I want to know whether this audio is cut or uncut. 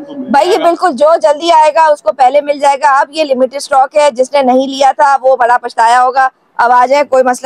uncut